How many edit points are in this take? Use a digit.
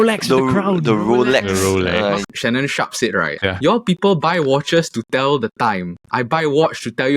2